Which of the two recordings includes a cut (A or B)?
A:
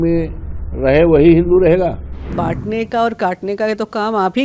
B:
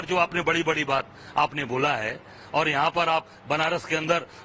A